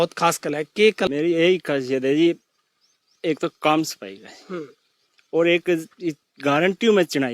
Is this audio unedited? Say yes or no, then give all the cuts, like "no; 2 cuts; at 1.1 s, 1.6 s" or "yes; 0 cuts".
no; 1 cut; at 1.1 s